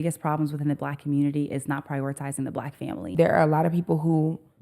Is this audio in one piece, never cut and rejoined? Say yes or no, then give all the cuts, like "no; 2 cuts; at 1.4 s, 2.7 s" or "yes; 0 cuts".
no; 1 cut; at 3.1 s